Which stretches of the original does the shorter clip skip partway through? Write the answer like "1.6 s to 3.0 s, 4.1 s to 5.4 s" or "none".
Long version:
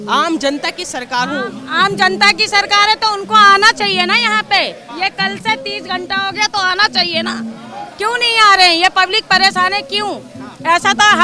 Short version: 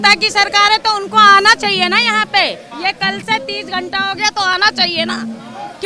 none